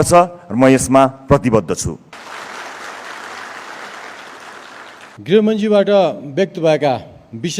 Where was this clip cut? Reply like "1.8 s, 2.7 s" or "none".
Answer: 2.1 s, 5.1 s